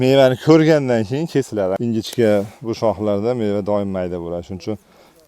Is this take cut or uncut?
cut